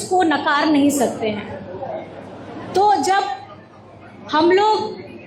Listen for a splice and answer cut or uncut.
uncut